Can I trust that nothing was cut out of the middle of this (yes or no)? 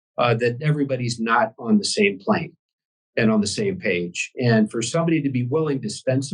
yes